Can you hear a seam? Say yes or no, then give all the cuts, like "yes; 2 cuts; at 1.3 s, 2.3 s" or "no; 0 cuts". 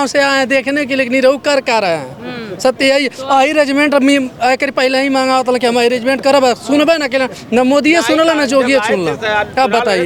no; 0 cuts